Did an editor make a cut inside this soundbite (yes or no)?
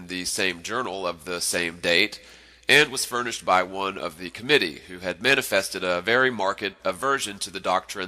yes